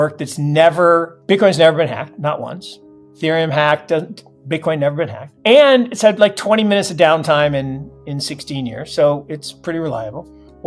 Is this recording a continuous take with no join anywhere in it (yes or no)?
no